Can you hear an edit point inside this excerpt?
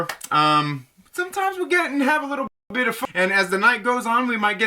yes; 1 cut; at 2.8 s

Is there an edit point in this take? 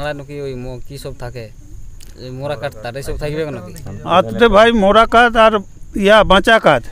no; 0 cuts

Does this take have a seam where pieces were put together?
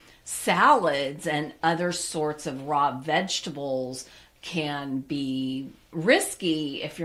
no; 0 cuts

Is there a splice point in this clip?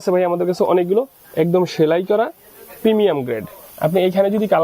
no; 0 cuts

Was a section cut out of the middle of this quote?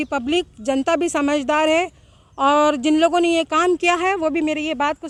no; 0 cuts

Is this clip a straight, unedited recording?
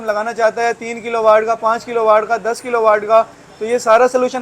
yes; 0 cuts

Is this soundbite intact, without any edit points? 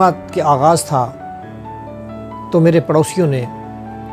no; 2 cuts; at 1.1 s, 2.5 s

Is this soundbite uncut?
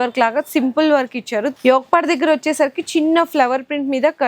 no; 1 cut; at 1.5 s

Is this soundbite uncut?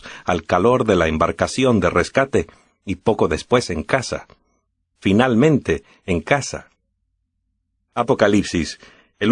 yes; 0 cuts

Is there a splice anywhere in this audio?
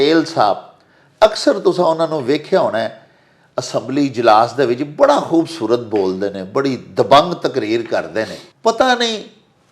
yes; 1 cut; at 8.4 s

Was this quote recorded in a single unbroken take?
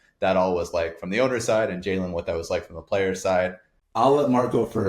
no; 1 cut; at 3.8 s

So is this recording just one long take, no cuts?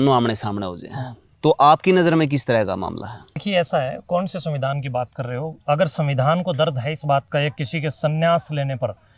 no; 1 cut; at 3.4 s

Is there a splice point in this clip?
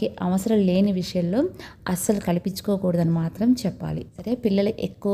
yes; 1 cut; at 4.2 s

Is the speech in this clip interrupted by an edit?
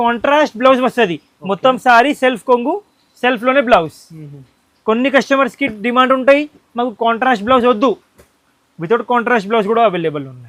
no; 0 cuts

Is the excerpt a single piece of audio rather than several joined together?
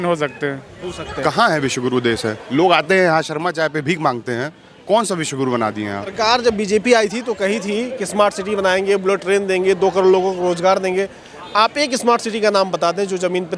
no; 2 cuts; at 1.1 s, 6.1 s

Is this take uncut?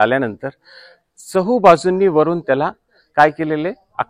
yes; 0 cuts

